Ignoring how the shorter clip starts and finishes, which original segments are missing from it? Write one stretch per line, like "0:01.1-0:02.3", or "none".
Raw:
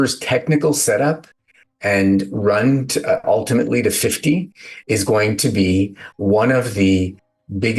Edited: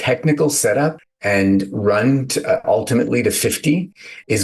0:01.3-0:01.7